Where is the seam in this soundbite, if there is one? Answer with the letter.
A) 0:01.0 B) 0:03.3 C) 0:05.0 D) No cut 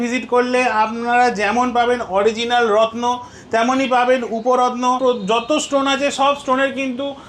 C